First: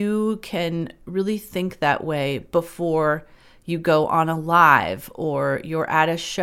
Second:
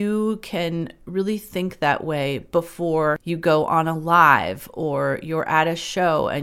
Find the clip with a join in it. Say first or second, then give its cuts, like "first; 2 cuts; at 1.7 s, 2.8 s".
second; 1 cut; at 3.2 s